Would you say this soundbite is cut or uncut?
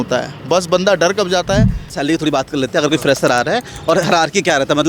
cut